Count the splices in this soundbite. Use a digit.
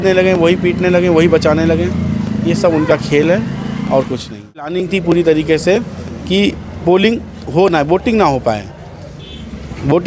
1